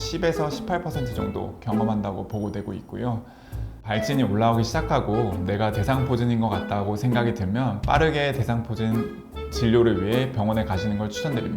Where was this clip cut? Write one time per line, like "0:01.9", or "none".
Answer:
0:03.7